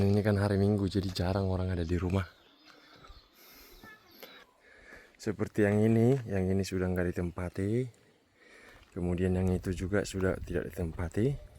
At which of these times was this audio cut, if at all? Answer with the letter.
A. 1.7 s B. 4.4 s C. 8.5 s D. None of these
B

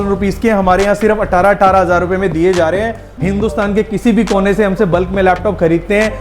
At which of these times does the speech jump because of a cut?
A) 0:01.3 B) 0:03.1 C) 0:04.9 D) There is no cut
B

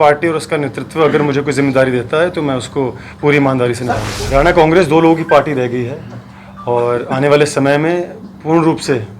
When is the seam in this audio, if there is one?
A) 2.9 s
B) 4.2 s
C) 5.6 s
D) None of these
B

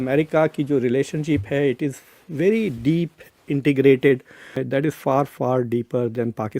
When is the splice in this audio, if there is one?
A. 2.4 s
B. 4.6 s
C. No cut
B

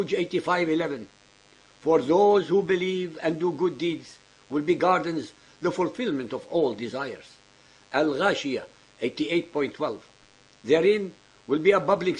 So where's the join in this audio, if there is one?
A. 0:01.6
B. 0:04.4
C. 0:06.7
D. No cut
A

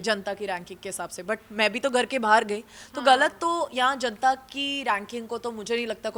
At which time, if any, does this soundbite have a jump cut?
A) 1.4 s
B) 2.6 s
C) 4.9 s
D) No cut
D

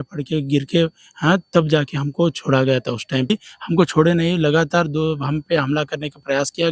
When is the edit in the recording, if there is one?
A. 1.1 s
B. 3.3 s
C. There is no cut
B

